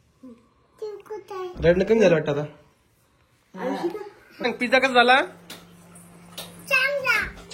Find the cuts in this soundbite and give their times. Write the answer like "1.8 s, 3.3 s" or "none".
4.2 s